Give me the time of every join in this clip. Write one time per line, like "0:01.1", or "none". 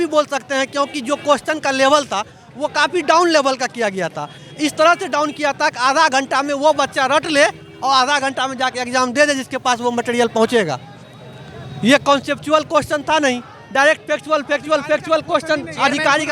none